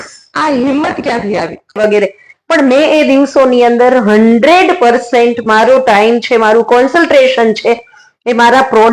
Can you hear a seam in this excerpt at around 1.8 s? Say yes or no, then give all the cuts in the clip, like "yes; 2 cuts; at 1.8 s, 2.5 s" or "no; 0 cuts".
yes; 1 cut; at 1.8 s